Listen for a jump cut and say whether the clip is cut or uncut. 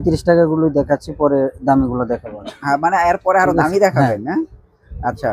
uncut